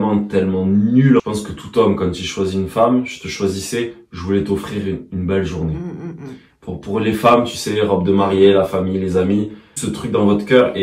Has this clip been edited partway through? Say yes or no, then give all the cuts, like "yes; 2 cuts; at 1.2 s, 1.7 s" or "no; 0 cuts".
yes; 2 cuts; at 1.2 s, 9.7 s